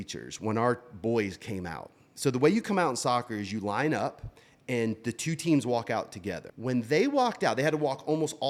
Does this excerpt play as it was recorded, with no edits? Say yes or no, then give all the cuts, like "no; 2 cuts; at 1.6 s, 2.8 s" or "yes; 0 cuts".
yes; 0 cuts